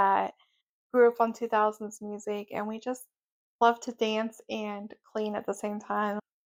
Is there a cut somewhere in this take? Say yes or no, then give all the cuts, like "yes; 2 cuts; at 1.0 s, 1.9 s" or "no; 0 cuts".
no; 0 cuts